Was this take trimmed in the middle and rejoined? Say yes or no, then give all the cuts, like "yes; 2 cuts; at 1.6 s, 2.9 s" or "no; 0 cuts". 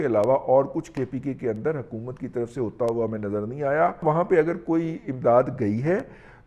yes; 1 cut; at 4.0 s